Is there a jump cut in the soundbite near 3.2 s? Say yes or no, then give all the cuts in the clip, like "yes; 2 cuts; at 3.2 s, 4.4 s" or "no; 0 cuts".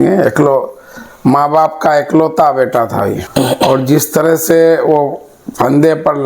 yes; 1 cut; at 3.2 s